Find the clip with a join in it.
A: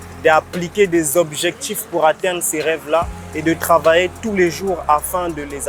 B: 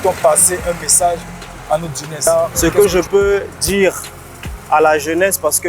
B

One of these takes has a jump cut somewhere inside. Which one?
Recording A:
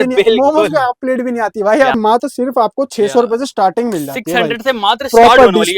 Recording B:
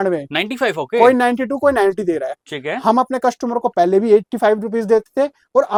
A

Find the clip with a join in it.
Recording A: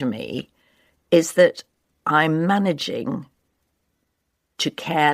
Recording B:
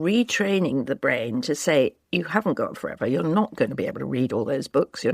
B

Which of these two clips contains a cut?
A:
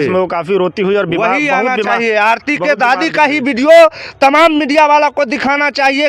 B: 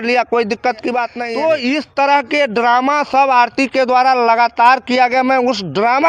B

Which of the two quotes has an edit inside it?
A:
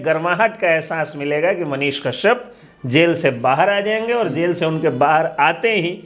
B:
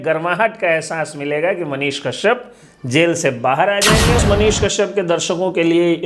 B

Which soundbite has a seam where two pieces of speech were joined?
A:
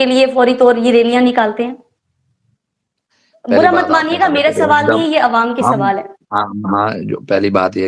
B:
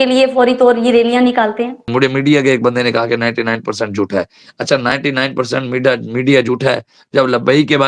B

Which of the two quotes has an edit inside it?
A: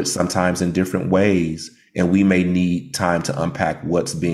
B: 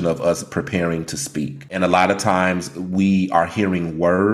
B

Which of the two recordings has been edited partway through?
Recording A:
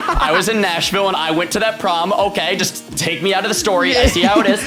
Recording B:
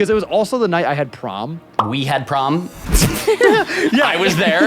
B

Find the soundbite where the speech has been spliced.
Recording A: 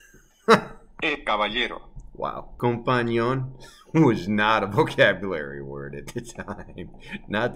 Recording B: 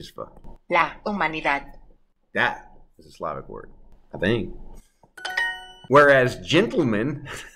A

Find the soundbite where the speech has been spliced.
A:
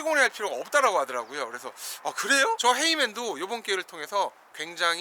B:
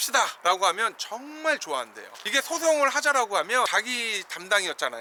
A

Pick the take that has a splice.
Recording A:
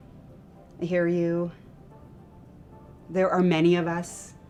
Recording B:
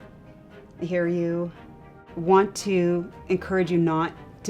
B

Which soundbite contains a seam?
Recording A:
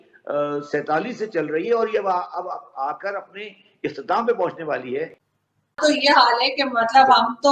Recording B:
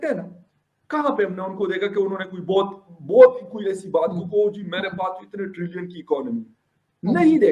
A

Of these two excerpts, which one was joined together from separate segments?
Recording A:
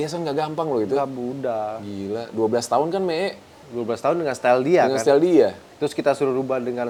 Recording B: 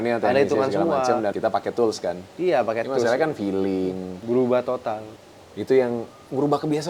B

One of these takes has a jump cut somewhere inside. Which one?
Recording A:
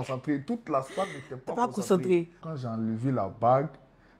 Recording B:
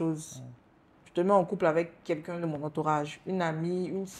A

